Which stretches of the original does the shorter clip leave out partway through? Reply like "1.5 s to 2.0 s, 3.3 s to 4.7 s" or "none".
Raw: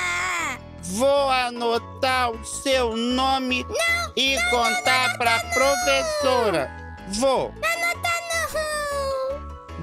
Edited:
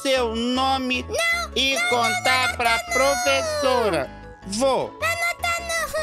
none